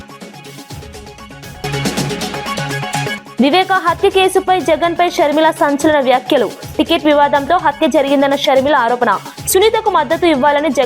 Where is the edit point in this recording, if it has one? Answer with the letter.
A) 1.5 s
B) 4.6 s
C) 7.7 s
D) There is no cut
A